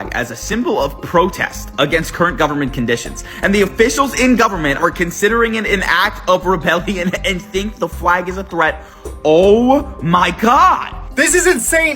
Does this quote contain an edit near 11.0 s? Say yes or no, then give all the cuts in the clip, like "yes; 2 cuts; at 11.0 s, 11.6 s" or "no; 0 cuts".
yes; 1 cut; at 11.0 s